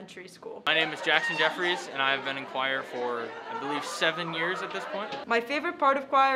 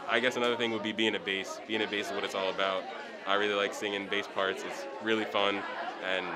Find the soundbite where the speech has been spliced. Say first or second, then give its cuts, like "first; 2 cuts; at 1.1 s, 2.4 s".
first; 2 cuts; at 0.7 s, 5.2 s